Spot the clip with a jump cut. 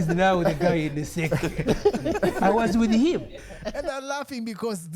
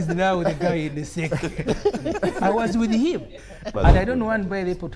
second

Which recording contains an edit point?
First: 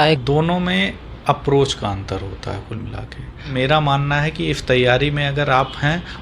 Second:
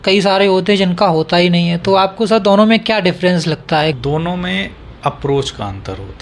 first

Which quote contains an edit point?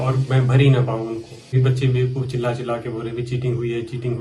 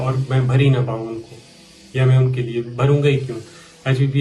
first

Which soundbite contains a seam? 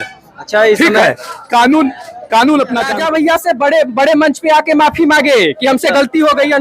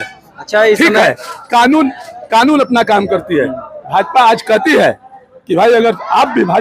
first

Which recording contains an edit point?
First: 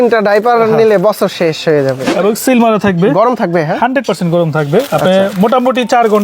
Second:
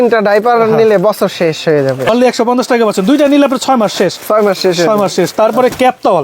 first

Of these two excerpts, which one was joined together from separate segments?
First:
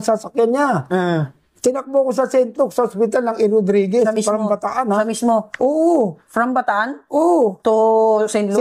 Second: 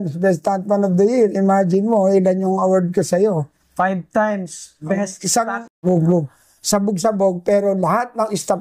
second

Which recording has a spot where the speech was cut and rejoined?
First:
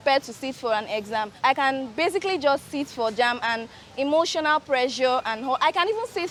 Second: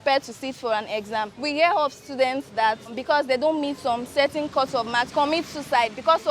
second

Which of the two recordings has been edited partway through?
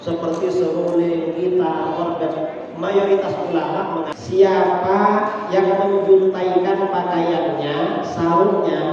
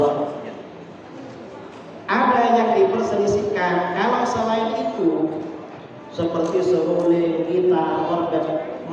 first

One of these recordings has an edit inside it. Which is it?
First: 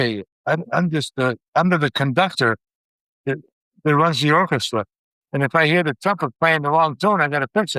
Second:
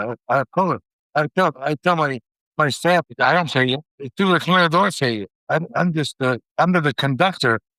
second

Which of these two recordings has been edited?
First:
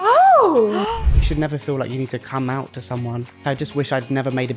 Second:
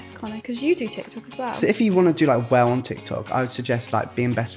first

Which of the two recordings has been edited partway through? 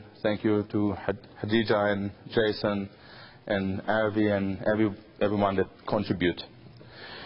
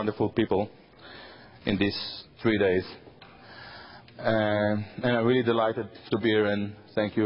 first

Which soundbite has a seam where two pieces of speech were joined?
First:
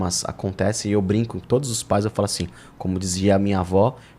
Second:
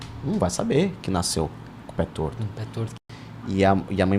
second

